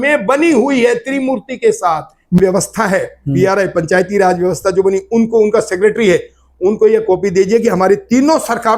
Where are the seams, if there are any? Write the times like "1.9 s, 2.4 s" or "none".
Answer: 2.4 s